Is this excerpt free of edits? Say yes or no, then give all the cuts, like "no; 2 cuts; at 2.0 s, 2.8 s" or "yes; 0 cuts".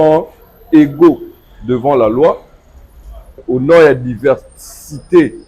no; 1 cut; at 3.4 s